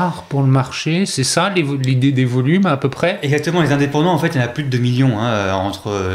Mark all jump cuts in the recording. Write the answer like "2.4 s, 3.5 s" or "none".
none